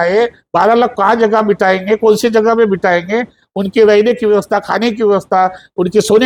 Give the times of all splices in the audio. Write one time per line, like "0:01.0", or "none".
none